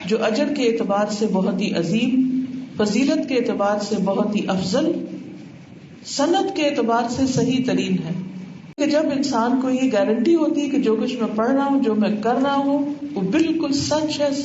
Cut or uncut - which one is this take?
cut